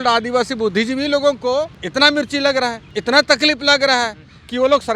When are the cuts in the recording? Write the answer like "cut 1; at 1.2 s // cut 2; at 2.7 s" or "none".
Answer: cut 1; at 1.8 s // cut 2; at 2.8 s